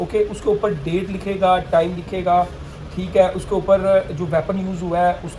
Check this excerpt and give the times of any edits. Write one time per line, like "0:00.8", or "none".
none